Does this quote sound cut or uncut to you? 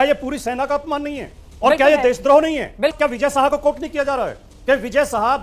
cut